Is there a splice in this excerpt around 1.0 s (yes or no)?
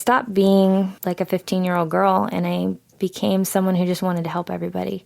yes